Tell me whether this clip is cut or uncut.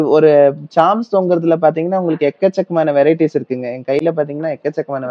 uncut